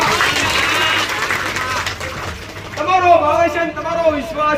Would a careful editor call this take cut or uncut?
uncut